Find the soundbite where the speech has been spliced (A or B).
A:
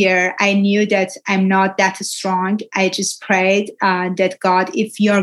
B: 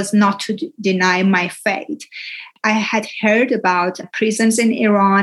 B